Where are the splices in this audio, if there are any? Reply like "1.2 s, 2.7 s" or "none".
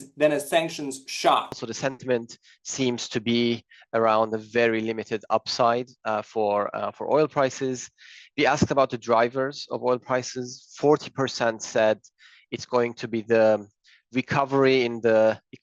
1.6 s